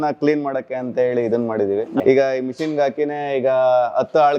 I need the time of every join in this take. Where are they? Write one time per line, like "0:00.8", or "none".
0:02.0